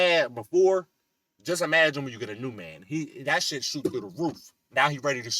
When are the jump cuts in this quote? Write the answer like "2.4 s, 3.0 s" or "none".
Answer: none